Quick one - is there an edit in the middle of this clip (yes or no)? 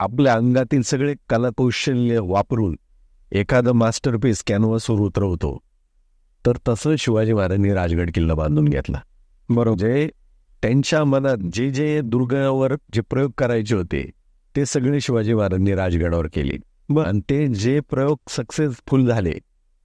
no